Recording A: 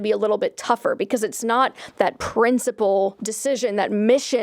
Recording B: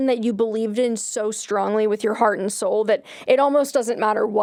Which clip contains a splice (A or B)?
A